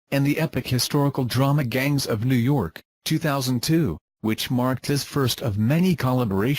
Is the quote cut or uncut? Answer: uncut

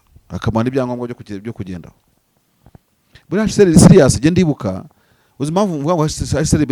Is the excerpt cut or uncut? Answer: uncut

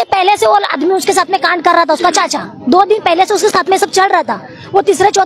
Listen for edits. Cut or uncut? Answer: uncut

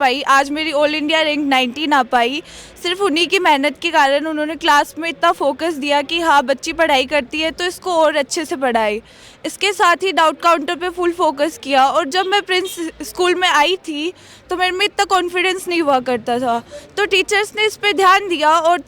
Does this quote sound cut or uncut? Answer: uncut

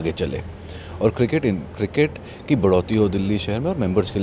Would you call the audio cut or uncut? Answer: uncut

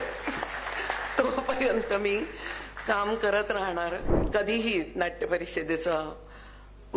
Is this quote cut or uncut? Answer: cut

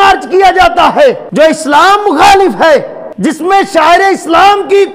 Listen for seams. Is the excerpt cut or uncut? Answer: cut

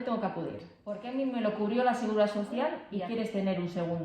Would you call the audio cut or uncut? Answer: cut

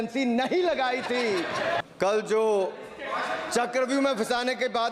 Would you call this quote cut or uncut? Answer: cut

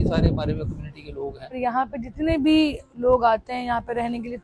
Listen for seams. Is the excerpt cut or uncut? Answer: cut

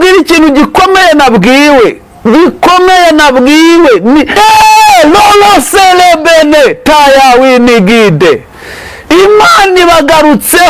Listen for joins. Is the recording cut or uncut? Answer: cut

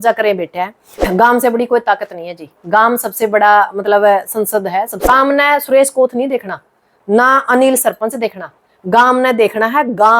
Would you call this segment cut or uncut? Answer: cut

